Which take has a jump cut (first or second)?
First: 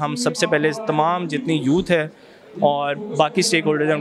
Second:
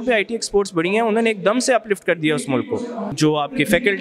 second